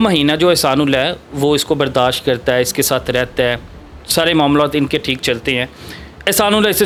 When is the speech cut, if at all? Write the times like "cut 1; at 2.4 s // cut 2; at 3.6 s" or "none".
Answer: none